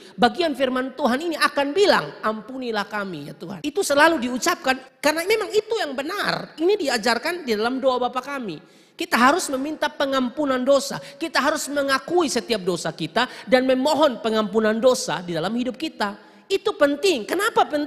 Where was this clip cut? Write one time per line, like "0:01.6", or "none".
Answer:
0:03.5
0:04.9